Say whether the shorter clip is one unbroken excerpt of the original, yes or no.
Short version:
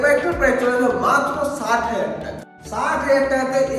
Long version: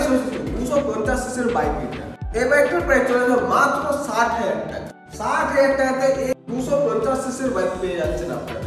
yes